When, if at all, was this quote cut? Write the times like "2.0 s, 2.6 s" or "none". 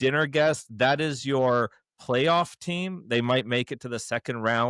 none

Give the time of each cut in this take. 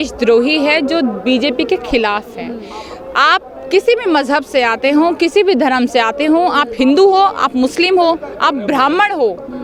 none

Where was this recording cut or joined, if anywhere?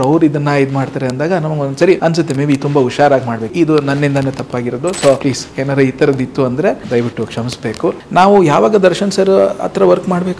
2.0 s, 3.5 s, 5.2 s, 6.8 s, 8.0 s

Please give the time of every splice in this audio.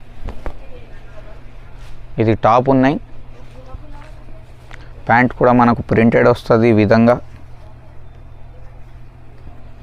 none

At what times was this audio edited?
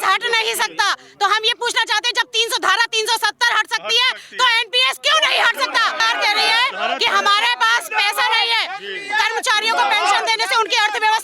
6.0 s

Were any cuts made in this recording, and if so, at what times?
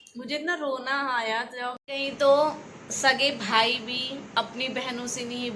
1.8 s

